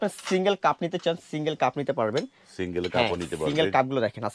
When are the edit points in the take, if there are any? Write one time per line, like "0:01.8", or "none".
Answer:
none